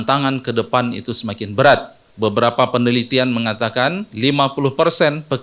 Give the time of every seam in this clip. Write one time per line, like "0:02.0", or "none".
0:02.0

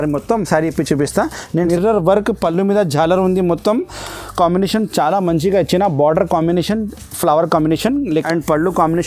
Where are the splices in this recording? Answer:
0:01.6
0:08.1

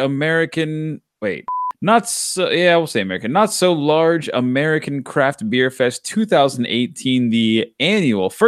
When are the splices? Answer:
0:01.5

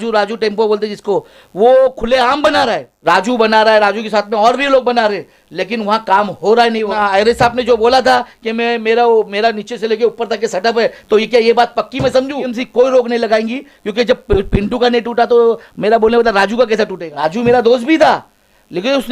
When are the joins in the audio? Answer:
0:02.9
0:06.9
0:12.6
0:17.0

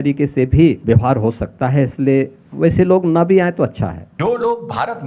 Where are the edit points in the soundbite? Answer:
0:00.8
0:04.0

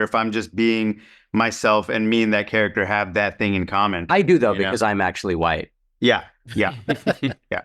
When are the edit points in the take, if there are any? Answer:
0:04.0

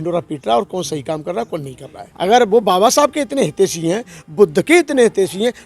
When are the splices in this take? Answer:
0:02.0

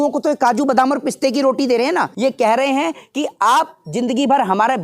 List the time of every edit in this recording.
0:02.1

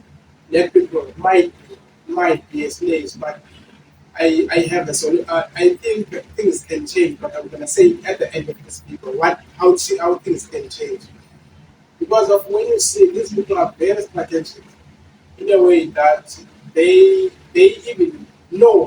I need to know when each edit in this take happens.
none

